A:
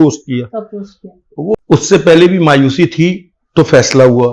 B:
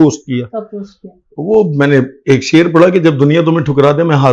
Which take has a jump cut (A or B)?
A